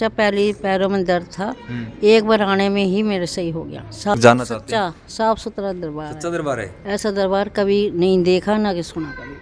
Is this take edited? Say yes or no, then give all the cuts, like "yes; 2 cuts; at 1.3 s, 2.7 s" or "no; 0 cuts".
yes; 1 cut; at 4.2 s